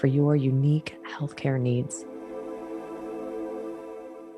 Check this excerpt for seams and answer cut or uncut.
cut